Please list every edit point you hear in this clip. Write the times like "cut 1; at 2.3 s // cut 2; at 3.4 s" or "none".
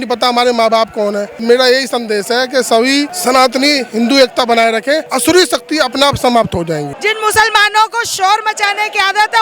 cut 1; at 1.3 s // cut 2; at 3.1 s // cut 3; at 5.1 s // cut 4; at 6.9 s